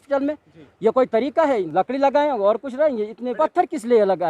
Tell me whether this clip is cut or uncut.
cut